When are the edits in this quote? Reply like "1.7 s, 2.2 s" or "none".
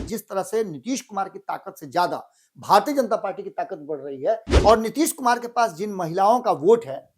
4.5 s